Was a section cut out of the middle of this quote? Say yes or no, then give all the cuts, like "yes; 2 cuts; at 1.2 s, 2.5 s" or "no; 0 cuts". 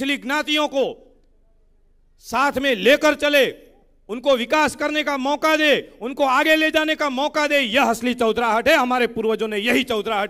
no; 0 cuts